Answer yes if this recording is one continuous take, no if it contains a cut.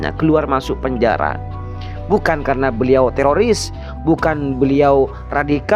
yes